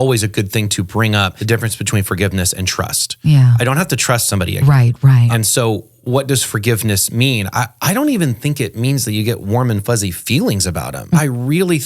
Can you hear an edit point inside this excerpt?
yes; 3 cuts; at 1.4 s, 5.3 s, 11.2 s

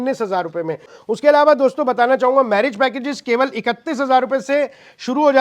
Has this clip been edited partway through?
yes; 1 cut; at 0.9 s

